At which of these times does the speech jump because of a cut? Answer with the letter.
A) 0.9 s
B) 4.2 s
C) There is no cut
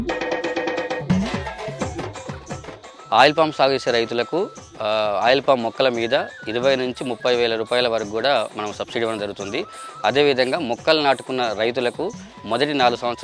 A